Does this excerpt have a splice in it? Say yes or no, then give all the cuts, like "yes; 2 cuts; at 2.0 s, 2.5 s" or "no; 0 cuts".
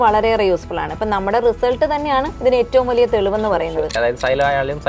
yes; 2 cuts; at 2.3 s, 4.0 s